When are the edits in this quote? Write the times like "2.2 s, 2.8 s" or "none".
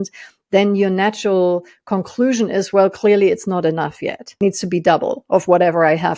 4.3 s